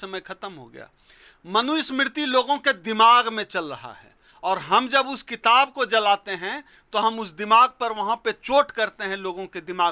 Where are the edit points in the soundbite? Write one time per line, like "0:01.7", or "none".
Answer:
none